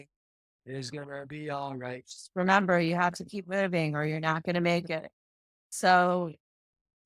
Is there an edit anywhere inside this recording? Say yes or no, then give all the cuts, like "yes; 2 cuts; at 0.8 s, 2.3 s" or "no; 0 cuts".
yes; 2 cuts; at 2.1 s, 5.7 s